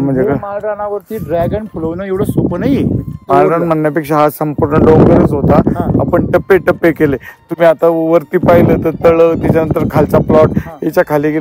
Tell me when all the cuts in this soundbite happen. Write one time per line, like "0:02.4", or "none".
0:03.2